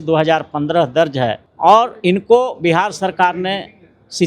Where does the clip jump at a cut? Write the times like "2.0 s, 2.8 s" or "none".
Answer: 1.5 s